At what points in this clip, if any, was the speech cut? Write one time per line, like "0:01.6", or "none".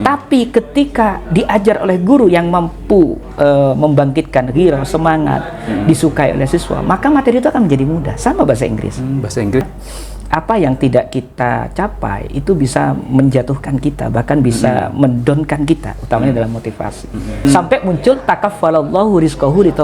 0:09.7
0:17.4